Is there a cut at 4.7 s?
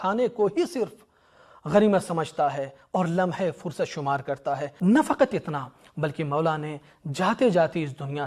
yes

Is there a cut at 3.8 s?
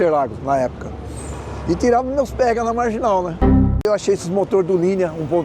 yes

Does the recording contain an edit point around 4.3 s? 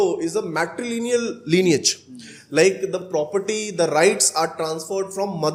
no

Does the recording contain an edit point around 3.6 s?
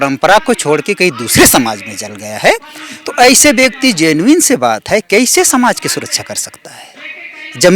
no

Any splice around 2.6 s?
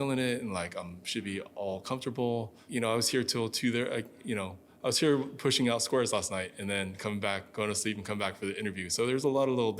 yes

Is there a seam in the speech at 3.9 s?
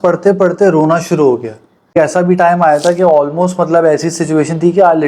no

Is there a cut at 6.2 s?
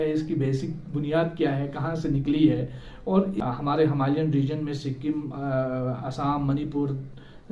no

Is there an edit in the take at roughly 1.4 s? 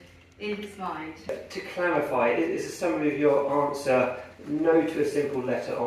yes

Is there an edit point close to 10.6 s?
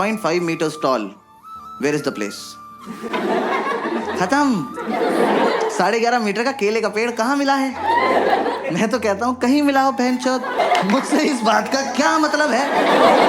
yes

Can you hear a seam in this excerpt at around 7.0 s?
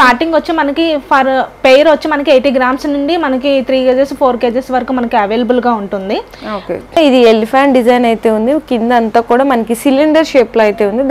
yes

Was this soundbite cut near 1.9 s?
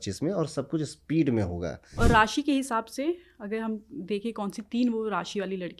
yes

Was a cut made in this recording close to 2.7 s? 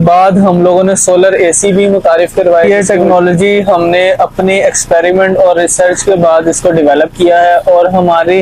yes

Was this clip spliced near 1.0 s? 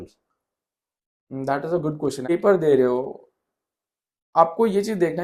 no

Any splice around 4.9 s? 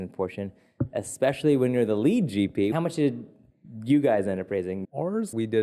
yes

